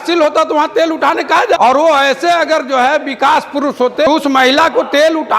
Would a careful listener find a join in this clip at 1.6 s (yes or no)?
yes